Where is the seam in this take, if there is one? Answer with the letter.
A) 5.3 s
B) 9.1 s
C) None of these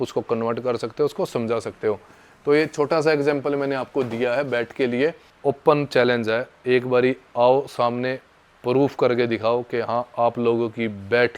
A